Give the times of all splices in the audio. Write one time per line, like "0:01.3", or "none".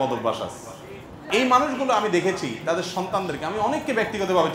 0:01.2